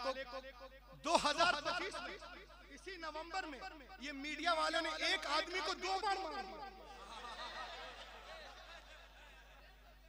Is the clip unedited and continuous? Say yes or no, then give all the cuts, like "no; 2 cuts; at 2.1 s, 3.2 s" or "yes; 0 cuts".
yes; 0 cuts